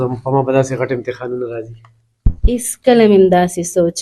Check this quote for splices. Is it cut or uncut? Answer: uncut